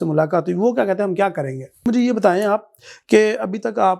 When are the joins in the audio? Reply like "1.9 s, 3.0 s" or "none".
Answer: 1.8 s